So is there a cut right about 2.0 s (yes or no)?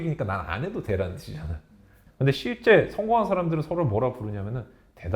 yes